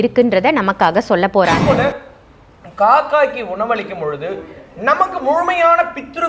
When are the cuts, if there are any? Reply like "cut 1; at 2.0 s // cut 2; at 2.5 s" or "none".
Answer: cut 1; at 1.6 s